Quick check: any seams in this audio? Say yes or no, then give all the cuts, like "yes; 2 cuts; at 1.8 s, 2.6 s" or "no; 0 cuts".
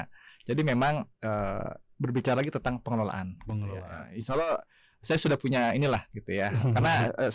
no; 0 cuts